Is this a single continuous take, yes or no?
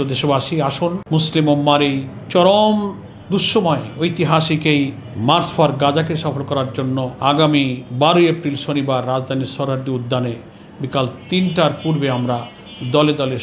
no